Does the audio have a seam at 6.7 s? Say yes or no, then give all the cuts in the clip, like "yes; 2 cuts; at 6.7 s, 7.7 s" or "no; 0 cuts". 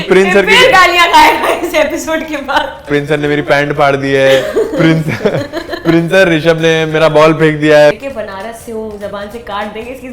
no; 2 cuts; at 2.9 s, 8.0 s